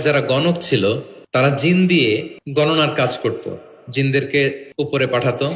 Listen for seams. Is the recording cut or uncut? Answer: cut